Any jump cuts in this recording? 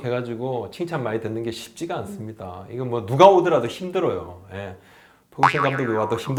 no; 0 cuts

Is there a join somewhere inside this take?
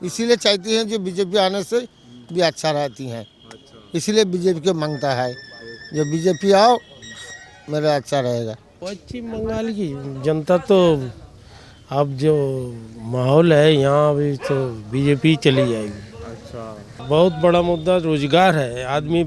yes; 2 cuts; at 8.6 s, 16.9 s

